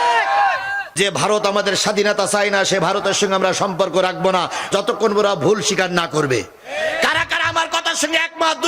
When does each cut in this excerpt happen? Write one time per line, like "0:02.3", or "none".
0:00.9